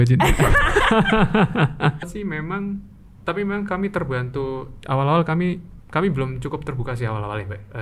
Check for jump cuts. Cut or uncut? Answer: cut